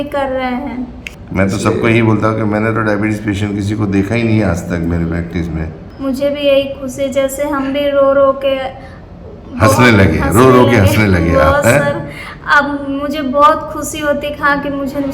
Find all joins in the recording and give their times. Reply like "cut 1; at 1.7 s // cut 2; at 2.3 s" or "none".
cut 1; at 1.0 s // cut 2; at 5.8 s